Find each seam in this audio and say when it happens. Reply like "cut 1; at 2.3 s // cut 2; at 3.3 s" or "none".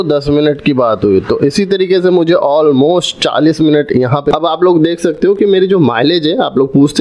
cut 1; at 4.3 s